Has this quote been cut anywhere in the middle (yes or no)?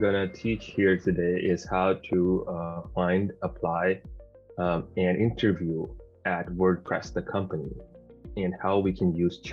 no